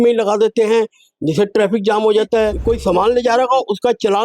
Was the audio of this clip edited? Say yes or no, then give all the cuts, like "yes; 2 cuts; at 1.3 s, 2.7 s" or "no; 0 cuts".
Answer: yes; 1 cut; at 2.6 s